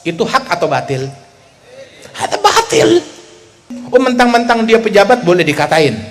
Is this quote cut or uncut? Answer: cut